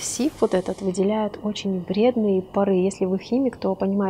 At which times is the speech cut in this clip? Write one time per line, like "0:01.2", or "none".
none